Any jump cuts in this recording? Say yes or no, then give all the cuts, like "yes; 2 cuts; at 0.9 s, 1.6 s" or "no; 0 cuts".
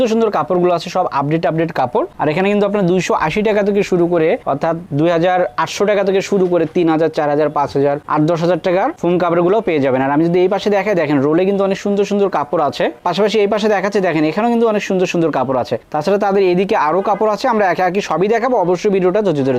no; 0 cuts